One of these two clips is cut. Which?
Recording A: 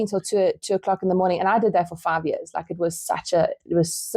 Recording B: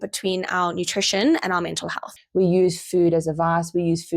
B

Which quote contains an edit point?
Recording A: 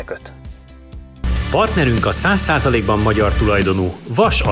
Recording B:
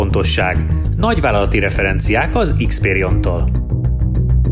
A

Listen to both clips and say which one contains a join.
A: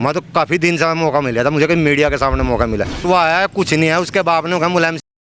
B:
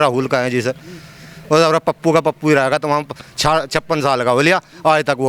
A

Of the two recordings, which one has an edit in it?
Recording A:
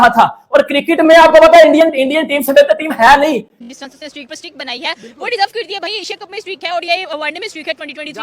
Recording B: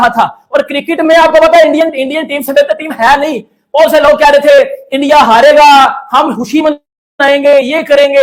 A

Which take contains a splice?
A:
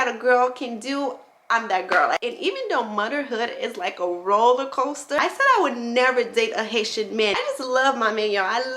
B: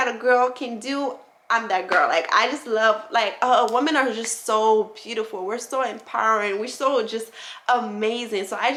A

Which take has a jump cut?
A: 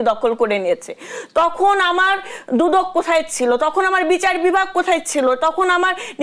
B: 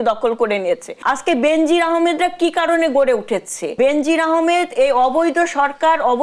B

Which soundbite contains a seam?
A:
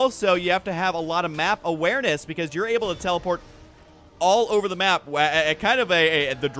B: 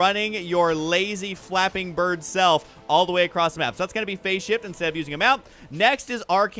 B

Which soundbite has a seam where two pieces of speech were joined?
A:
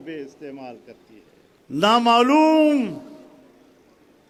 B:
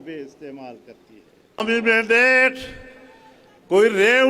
B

